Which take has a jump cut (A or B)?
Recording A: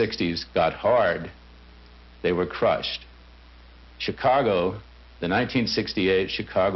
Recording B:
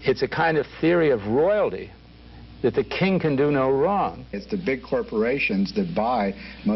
B